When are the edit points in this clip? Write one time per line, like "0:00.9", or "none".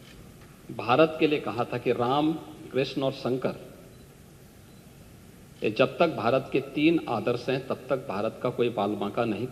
none

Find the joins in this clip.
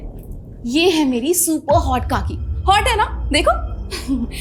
none

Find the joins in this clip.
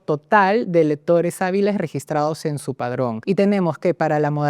0:03.2

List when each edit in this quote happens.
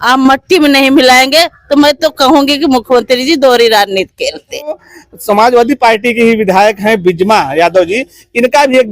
0:04.7

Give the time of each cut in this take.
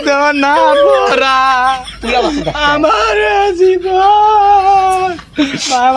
none

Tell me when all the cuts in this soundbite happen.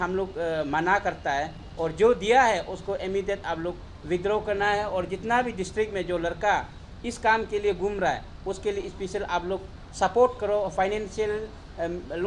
none

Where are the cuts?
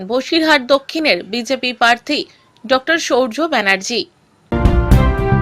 0:04.5

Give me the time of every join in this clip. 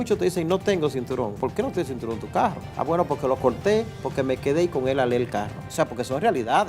0:01.4
0:02.6
0:05.6

